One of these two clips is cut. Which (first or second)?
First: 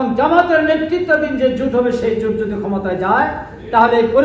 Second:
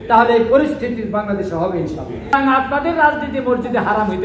second